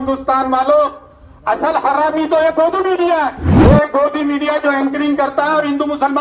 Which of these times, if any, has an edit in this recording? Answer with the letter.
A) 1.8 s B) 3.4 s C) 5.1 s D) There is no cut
B